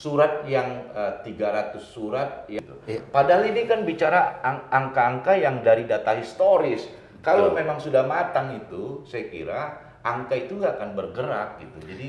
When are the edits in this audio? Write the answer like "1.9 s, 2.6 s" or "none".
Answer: 2.6 s